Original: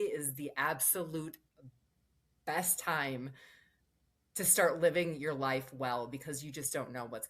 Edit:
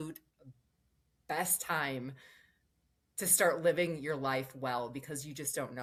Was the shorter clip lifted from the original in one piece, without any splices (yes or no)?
yes